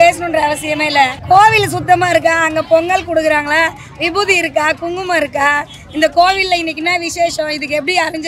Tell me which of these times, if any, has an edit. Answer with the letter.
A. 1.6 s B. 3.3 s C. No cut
C